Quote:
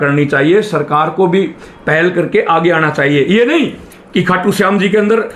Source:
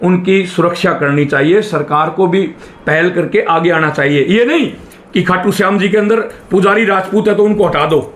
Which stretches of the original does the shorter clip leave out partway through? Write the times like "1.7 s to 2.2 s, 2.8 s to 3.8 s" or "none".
none